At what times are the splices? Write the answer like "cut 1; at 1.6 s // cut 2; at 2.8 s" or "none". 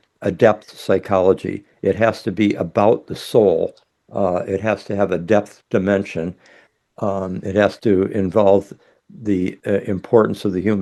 none